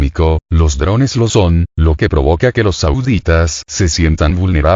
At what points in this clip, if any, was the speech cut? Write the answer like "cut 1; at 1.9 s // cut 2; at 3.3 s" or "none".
none